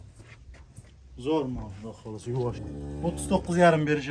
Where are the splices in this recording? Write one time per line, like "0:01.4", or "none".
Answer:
0:02.6